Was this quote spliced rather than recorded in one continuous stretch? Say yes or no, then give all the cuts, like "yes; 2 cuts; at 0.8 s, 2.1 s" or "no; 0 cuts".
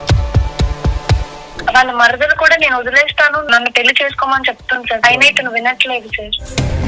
yes; 3 cuts; at 1.4 s, 3.5 s, 5.0 s